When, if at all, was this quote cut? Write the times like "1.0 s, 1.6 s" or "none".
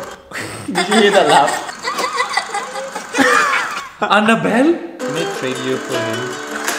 1.7 s, 4.9 s